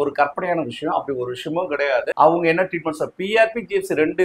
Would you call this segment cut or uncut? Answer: cut